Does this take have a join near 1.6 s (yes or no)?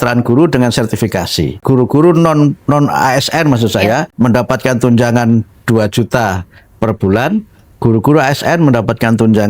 yes